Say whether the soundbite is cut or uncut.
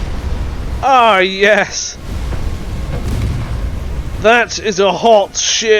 uncut